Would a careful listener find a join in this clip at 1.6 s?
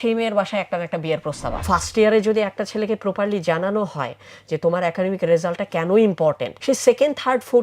yes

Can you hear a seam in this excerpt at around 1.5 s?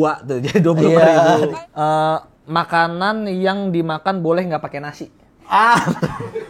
yes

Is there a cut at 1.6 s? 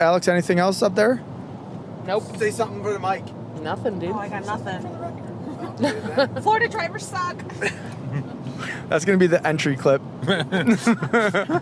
no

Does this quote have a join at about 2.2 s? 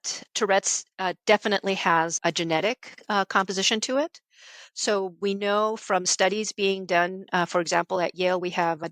yes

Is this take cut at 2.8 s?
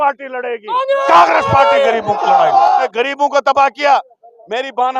yes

